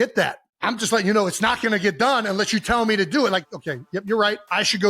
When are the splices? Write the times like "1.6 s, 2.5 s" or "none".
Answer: 3.6 s